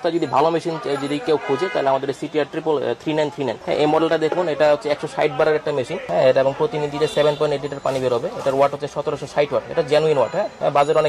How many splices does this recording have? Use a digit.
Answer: 0